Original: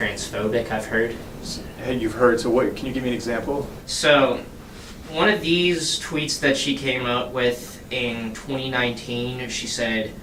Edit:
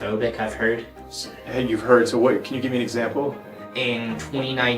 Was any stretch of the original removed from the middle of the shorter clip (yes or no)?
yes